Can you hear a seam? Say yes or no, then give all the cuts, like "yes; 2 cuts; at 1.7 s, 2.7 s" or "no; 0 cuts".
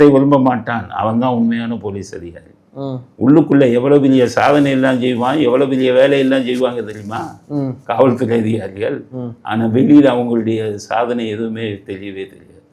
no; 0 cuts